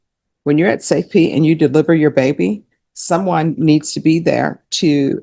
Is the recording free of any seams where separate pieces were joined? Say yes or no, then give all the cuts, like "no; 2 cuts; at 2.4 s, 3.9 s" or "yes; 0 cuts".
yes; 0 cuts